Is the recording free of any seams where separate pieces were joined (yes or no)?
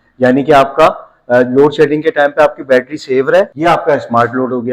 no